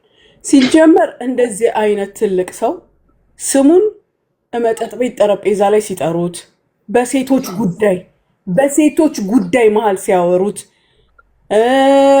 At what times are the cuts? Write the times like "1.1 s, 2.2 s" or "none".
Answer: none